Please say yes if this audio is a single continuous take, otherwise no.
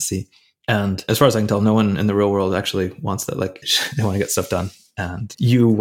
no